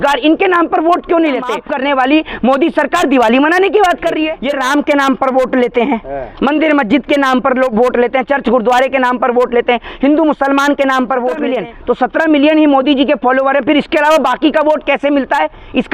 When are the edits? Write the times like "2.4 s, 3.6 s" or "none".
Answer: 1.6 s, 4.3 s, 11.5 s

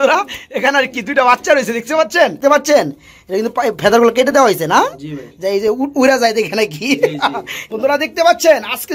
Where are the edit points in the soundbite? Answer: 2.4 s, 7.5 s

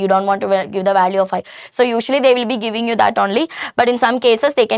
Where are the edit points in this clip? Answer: none

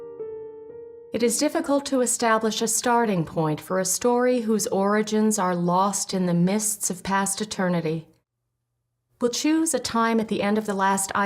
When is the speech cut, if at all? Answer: 1.6 s

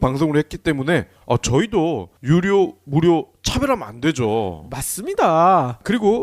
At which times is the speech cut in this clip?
4.3 s

